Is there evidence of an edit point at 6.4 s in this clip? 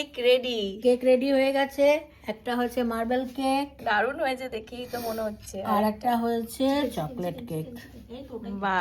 no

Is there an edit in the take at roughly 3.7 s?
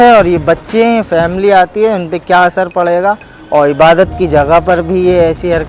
no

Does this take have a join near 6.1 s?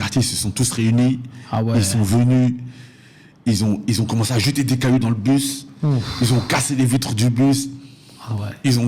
no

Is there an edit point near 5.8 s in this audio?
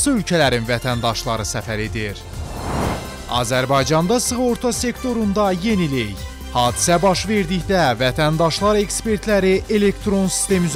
no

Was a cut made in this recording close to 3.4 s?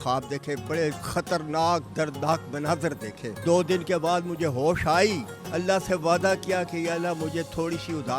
yes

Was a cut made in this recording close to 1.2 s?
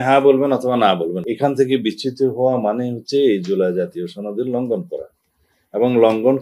yes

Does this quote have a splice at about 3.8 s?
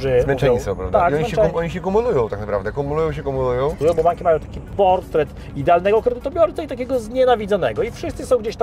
yes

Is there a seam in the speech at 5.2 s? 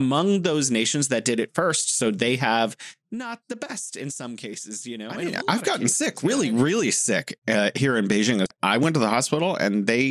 yes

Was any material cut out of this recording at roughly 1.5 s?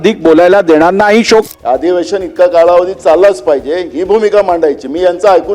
yes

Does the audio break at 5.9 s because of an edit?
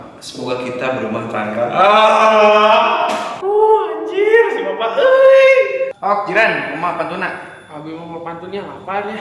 yes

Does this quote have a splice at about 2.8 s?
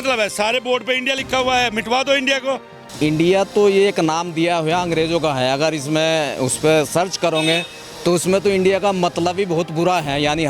yes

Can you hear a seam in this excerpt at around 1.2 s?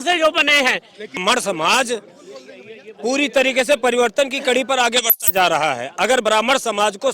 yes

